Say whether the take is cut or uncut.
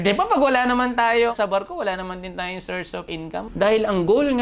cut